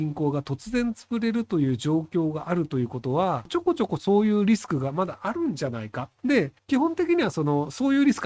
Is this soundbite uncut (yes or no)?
no